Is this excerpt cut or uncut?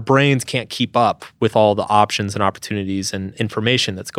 cut